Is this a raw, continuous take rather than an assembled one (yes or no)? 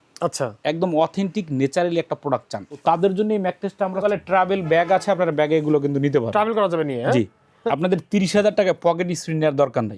no